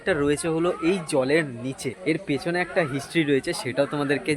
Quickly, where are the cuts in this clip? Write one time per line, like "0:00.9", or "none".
0:01.9